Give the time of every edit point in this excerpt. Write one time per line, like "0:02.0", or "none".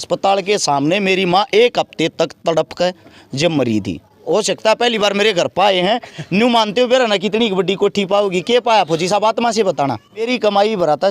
0:04.2
0:10.3